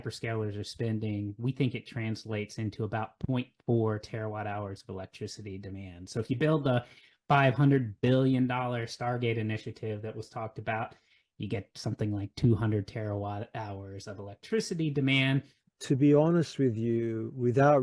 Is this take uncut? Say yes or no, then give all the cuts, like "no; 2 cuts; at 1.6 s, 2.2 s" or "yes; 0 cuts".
no; 1 cut; at 15.5 s